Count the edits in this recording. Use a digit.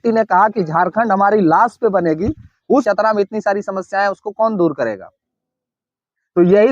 1